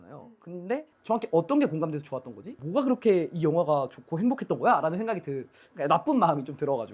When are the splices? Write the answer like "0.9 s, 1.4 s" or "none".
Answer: 0.9 s, 2.5 s, 5.7 s